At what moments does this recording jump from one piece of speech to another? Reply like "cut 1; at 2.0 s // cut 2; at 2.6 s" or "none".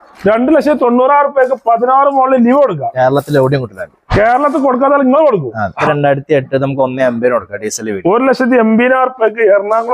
cut 1; at 5.8 s